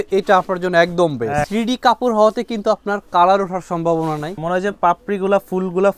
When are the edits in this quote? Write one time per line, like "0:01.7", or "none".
0:01.5
0:04.3

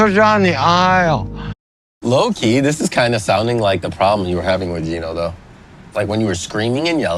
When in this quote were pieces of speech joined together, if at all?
0:01.3

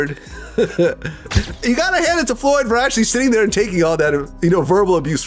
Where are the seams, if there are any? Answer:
0:01.2

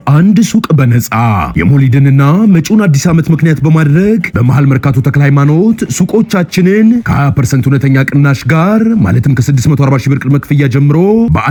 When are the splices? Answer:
none

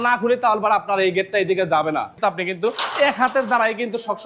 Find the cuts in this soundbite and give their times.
0:02.2

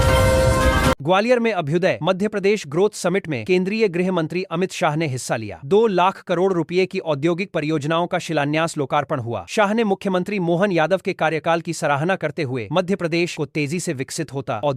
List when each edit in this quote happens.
0:01.0

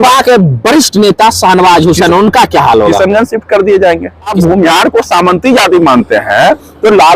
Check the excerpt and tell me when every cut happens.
0:04.3

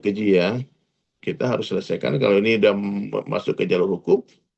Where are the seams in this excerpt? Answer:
0:01.1

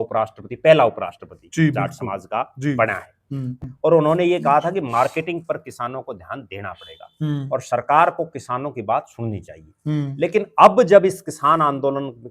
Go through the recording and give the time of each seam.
0:03.6

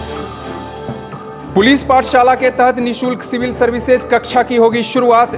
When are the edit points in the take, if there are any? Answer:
0:01.2

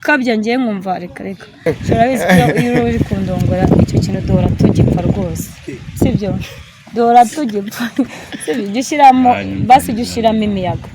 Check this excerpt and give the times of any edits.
0:01.7

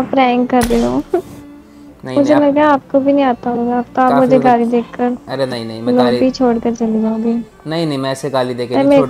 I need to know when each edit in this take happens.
none

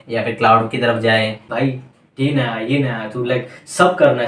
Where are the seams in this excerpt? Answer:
0:01.5

